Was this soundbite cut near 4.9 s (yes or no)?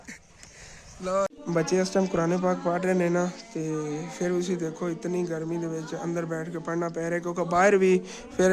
no